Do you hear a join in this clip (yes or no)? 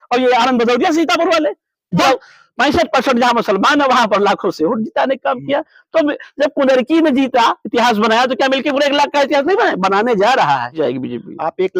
yes